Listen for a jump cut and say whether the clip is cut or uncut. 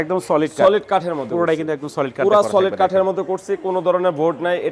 uncut